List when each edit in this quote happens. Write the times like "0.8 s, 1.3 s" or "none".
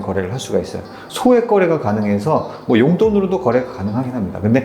1.0 s